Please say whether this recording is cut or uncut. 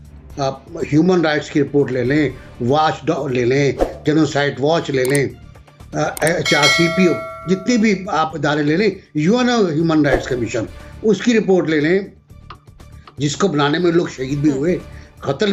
uncut